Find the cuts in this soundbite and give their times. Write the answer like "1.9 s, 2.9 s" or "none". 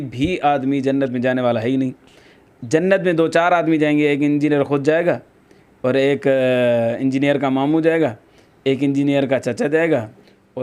none